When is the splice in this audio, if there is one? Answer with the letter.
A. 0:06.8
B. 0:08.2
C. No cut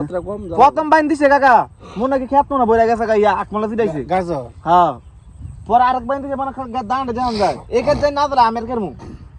C